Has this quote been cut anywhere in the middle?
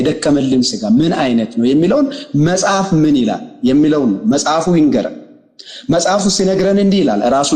no; 0 cuts

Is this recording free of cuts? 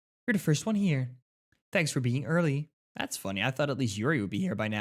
no; 1 cut; at 2.8 s

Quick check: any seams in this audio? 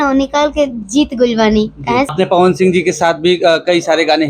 yes; 1 cut; at 2.1 s

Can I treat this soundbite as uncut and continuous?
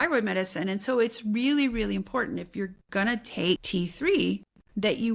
no; 1 cut; at 3.6 s

